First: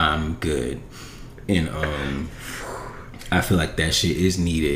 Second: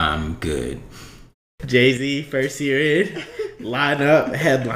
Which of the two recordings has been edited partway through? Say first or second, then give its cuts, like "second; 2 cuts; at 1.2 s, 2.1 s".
second; 1 cut; at 1.5 s